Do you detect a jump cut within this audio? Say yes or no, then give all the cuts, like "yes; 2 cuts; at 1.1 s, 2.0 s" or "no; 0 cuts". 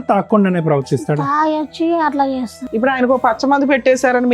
yes; 1 cut; at 2.6 s